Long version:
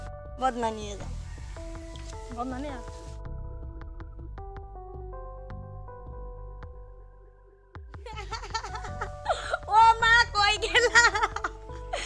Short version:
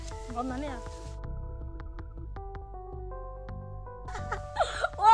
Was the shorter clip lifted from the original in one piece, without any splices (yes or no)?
no